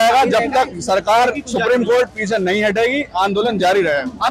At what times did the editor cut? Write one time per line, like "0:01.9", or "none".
none